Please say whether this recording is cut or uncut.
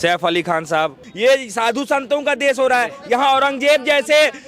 cut